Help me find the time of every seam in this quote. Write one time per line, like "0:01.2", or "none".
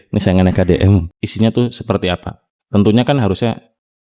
0:01.1